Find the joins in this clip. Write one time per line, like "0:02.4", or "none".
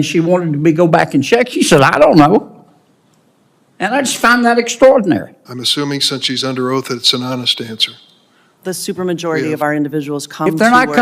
0:08.4